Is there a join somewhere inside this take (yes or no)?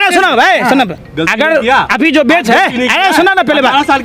yes